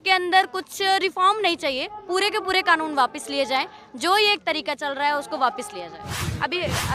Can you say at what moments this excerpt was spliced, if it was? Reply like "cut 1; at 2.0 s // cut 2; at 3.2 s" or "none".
cut 1; at 6.1 s